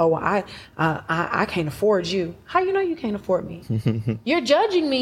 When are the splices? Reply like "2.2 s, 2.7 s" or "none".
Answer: 3.6 s

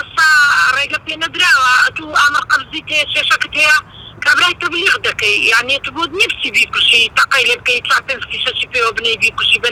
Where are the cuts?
none

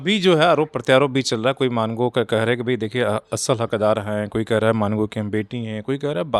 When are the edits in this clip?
none

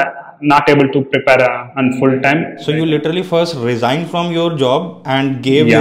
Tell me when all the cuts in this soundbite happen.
1.7 s, 2.5 s

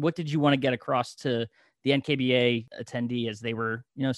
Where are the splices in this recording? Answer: 2.7 s

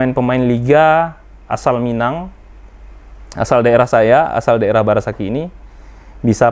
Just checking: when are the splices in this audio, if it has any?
none

